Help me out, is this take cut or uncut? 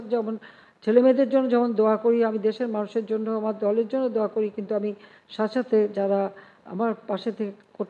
uncut